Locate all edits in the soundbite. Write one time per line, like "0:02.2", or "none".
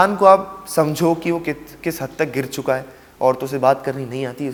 none